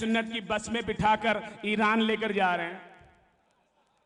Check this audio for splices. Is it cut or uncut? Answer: uncut